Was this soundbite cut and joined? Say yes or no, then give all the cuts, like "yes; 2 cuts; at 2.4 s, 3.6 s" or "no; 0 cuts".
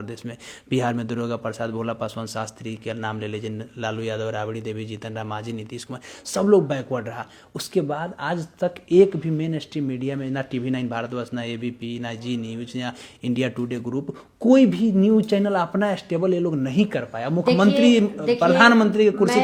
no; 0 cuts